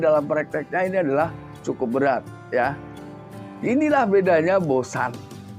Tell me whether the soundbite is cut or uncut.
cut